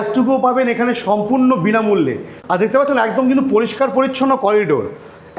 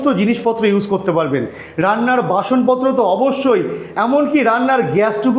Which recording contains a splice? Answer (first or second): first